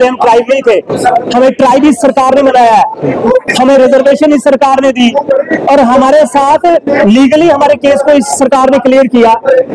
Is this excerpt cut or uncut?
uncut